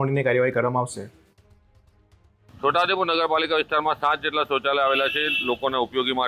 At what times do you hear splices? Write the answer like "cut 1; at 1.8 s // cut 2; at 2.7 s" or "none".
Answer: none